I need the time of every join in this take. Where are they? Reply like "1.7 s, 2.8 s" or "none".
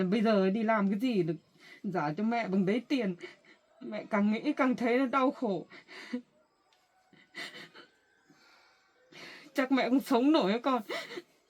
none